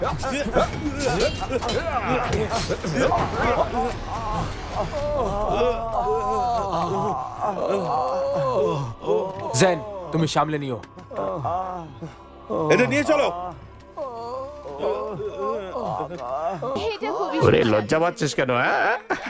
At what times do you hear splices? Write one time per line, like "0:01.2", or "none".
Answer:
0:16.8